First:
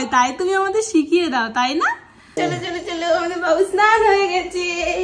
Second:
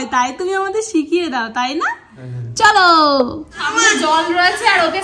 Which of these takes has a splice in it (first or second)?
first